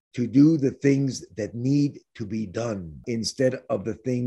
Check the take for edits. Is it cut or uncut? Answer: cut